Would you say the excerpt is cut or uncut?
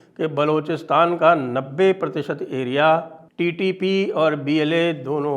cut